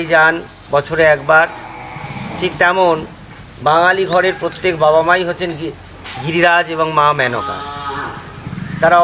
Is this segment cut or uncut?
uncut